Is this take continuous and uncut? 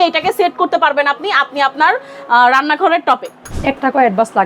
no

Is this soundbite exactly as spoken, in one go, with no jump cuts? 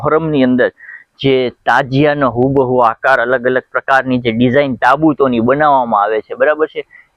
yes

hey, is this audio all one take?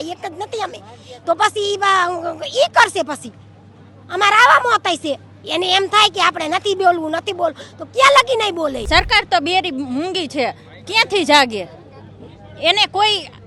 no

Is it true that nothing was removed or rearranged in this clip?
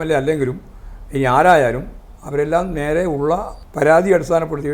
no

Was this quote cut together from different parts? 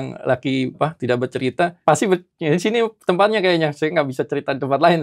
yes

